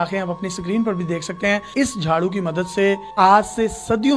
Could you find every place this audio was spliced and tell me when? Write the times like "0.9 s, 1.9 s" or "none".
1.7 s, 3.1 s